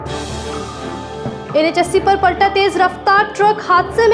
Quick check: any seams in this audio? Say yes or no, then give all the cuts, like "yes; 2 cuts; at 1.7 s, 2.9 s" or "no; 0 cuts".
no; 0 cuts